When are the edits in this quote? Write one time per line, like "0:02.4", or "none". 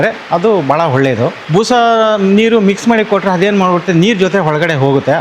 0:01.4